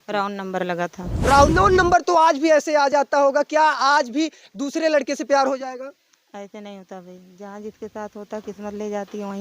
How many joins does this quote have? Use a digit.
1